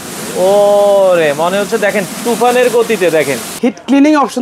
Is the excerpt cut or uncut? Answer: cut